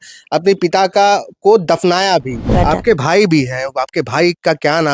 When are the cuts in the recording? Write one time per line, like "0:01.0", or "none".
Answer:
0:02.4

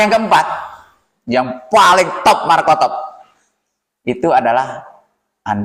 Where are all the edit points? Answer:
none

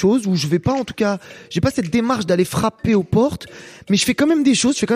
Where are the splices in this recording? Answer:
none

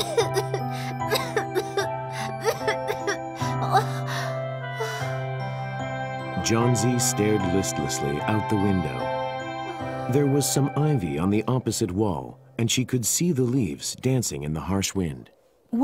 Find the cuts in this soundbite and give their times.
0:03.4

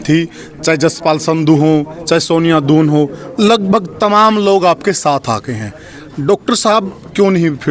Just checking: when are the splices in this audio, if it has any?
none

